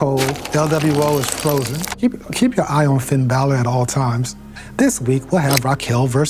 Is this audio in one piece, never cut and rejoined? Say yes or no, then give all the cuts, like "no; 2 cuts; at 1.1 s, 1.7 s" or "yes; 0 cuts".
no; 2 cuts; at 1.9 s, 4.6 s